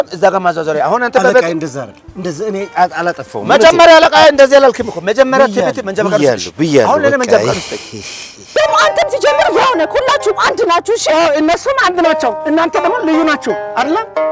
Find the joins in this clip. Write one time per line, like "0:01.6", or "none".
0:08.4